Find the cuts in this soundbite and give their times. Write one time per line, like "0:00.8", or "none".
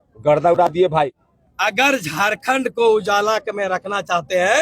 0:01.3